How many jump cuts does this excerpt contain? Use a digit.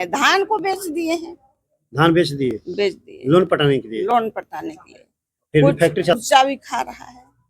1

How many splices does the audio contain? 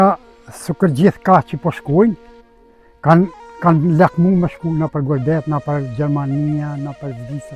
0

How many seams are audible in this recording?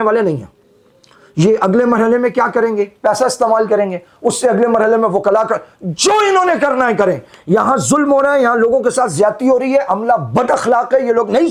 0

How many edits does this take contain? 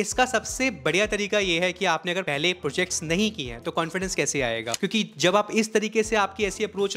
1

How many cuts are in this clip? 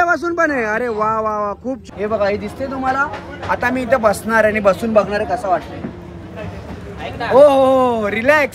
1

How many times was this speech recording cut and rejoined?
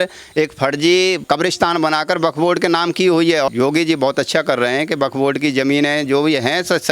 1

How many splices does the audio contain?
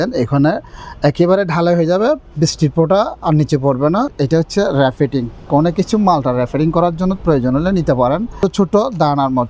2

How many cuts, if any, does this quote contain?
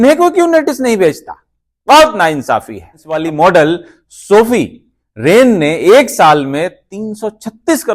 1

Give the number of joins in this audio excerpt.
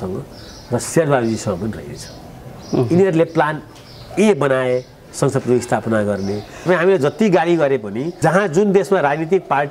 2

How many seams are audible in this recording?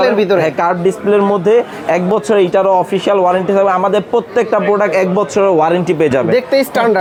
0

